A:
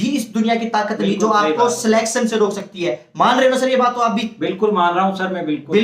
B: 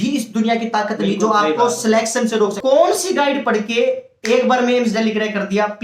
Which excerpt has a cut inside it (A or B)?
B